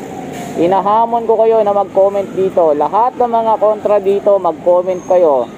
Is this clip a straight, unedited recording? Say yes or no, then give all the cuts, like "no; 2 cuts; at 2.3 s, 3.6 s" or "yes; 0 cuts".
yes; 0 cuts